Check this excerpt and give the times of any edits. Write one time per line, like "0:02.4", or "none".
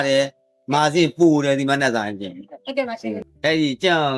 0:03.3